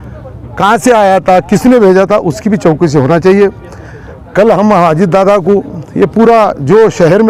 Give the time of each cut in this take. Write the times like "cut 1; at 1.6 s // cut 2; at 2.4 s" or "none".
none